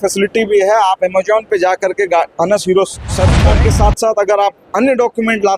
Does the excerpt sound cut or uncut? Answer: cut